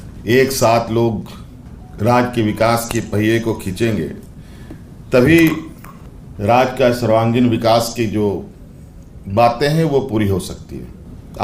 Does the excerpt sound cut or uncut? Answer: uncut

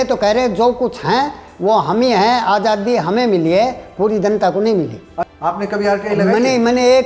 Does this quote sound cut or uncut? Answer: cut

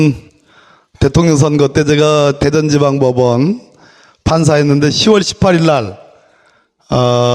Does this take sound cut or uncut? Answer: cut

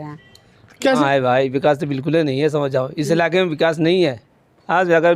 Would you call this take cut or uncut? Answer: cut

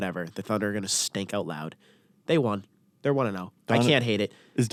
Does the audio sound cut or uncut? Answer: uncut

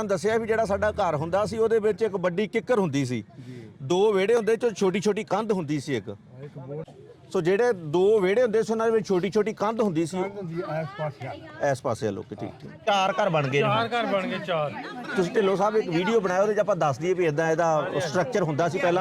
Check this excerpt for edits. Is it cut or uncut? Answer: cut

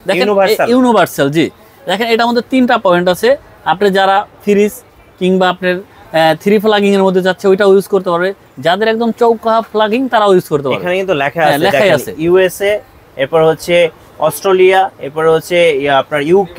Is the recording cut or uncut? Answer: uncut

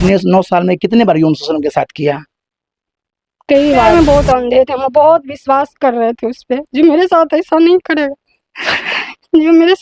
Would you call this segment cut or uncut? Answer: cut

